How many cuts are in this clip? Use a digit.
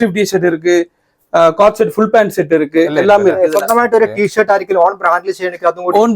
1